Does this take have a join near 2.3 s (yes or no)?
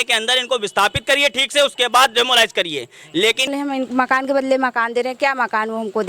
no